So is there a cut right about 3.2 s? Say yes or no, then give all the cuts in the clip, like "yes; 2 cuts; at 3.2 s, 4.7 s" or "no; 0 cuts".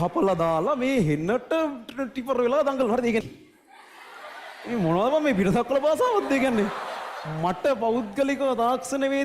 yes; 1 cut; at 3.2 s